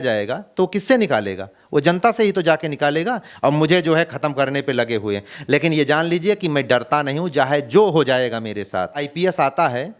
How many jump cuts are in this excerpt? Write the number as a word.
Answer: two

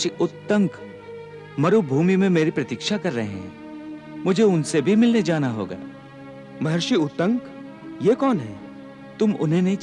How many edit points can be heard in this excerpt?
zero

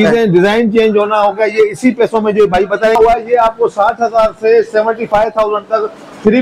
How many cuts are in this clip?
one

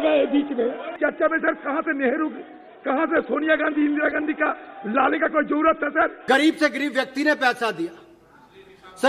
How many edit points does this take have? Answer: two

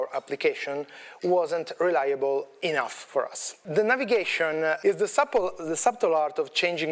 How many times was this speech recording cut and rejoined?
two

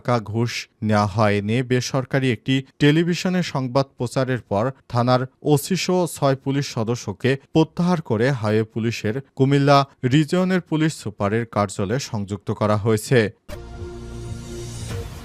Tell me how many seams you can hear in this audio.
one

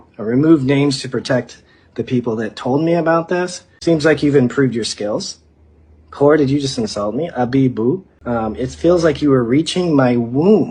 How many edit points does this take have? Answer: two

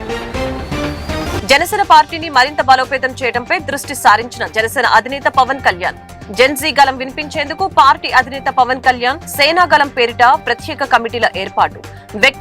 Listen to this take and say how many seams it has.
one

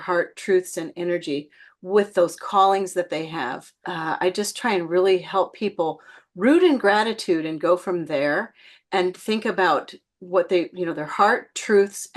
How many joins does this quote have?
one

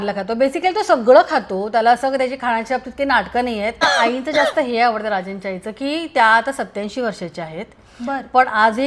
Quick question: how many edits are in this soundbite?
one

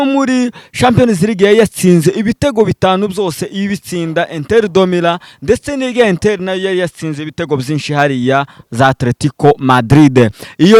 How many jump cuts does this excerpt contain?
zero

